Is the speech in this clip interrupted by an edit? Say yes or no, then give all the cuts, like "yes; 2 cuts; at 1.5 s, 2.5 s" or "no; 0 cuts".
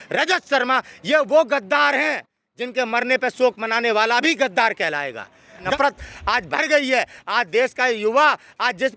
yes; 1 cut; at 5.8 s